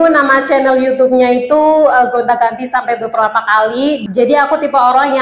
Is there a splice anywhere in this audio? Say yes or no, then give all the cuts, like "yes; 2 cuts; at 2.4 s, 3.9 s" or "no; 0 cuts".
yes; 1 cut; at 4.0 s